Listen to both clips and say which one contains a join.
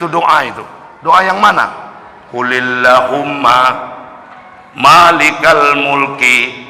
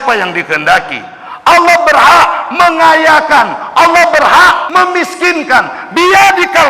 second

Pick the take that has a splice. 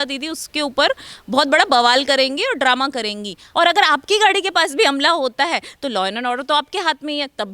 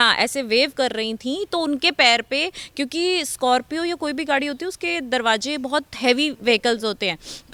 first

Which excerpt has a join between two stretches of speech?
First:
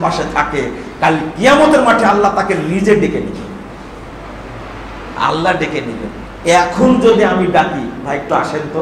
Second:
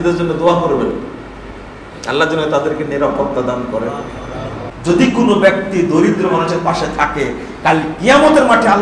second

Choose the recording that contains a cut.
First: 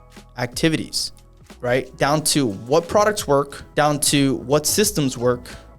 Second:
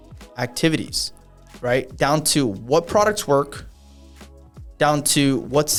first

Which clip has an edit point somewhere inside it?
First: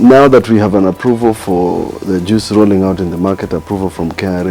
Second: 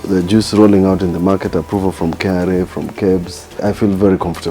second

